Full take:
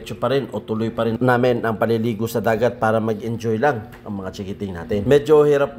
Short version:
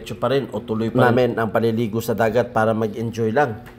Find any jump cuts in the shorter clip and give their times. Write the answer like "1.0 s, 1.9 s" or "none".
0.9 s